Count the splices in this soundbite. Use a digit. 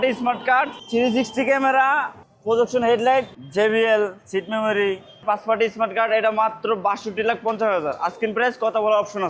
3